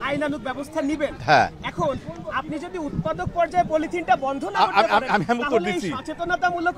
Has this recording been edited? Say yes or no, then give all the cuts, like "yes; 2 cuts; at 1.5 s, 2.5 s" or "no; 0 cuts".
no; 0 cuts